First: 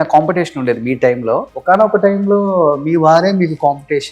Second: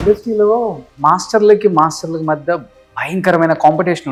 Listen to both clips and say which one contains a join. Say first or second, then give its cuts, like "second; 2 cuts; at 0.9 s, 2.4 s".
first; 1 cut; at 1.5 s